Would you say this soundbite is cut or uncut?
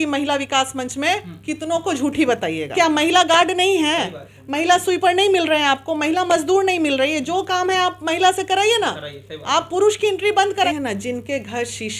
cut